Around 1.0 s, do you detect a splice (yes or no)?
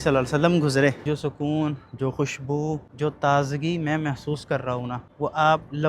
yes